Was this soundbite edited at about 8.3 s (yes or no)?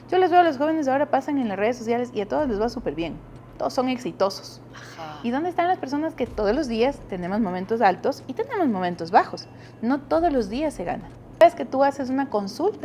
no